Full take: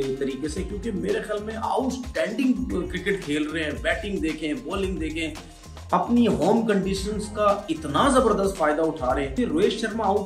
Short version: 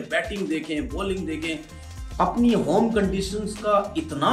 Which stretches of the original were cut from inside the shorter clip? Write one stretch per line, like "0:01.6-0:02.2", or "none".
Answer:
none